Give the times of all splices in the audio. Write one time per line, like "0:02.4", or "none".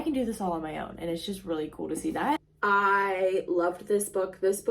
0:02.5